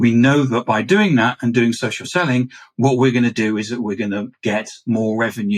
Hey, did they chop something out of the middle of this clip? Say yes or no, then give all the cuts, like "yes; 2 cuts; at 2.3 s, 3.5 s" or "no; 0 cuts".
no; 0 cuts